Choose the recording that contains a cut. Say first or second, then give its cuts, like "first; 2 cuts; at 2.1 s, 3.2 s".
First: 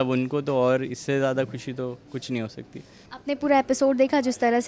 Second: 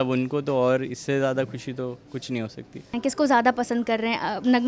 second; 1 cut; at 2.9 s